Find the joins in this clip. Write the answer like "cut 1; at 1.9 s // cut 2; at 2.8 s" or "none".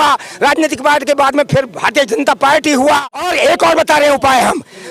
cut 1; at 3.2 s